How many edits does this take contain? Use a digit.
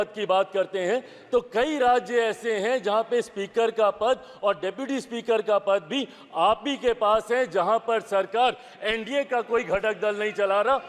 0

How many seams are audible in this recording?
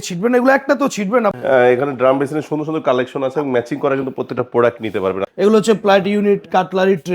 2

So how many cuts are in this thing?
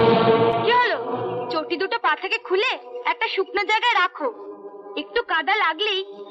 0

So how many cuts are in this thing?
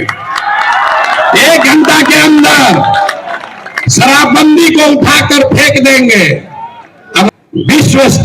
1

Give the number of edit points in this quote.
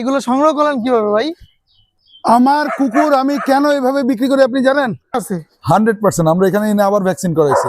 1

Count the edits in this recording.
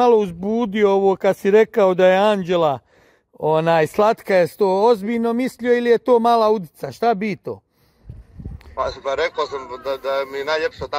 0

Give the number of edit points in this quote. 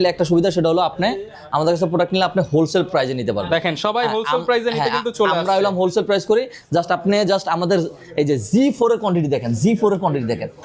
0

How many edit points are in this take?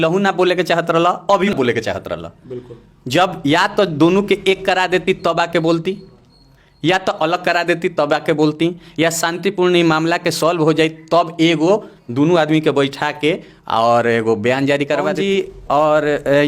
2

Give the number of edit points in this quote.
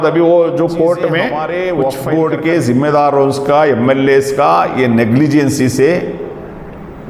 1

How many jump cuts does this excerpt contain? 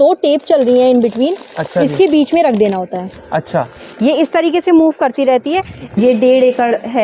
1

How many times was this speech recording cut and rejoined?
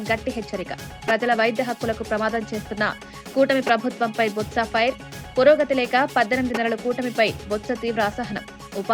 0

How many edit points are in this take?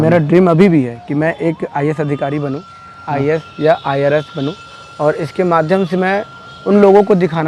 0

